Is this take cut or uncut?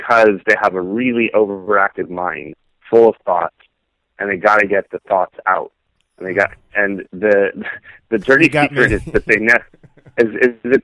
uncut